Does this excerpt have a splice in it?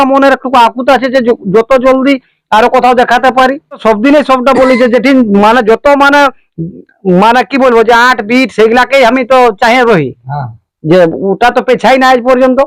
yes; 1 cut; at 3.8 s

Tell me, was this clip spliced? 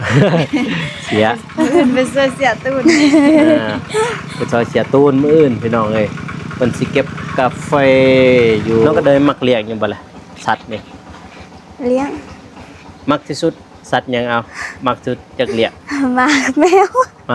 yes; 1 cut; at 8.9 s

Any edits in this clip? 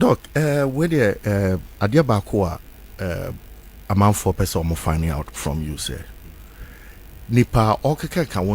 no; 0 cuts

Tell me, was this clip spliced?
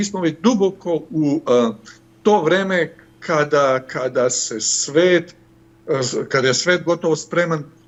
no; 0 cuts

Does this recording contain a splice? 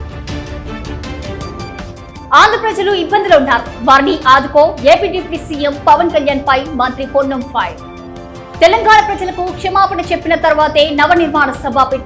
yes; 1 cut; at 2.3 s

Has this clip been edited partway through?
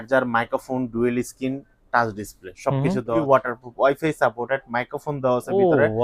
yes; 1 cut; at 3.2 s

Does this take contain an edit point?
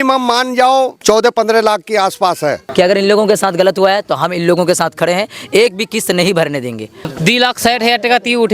yes; 3 cuts; at 1.0 s, 2.6 s, 7.1 s

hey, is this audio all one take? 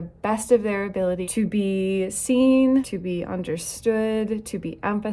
no; 2 cuts; at 1.3 s, 2.9 s

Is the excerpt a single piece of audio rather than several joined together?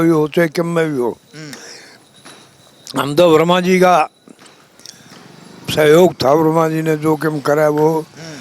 yes; 0 cuts

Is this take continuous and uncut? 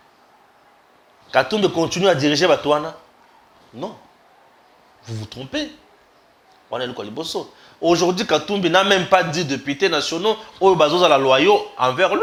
yes; 0 cuts

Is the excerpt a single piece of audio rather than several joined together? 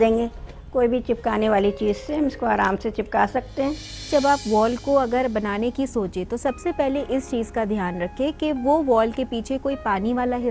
no; 1 cut; at 4.1 s

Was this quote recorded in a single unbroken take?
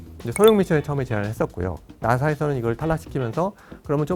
no; 1 cut; at 1.9 s

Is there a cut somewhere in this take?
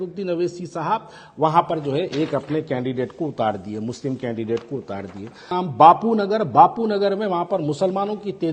yes; 1 cut; at 5.5 s

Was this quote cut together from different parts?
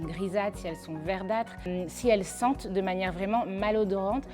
yes; 1 cut; at 1.6 s

